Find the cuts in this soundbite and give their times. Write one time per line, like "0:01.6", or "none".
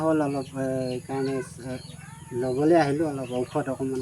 none